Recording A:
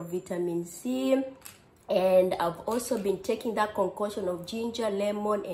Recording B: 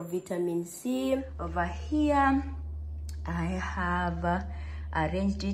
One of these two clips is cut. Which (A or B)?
B